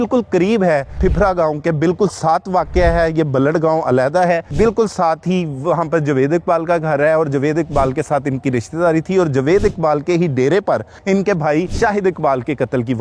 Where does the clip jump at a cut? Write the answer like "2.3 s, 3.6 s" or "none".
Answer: 0.9 s, 4.5 s, 10.9 s, 11.7 s